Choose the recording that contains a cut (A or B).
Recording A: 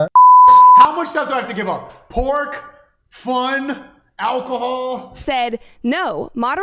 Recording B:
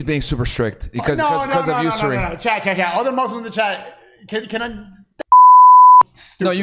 A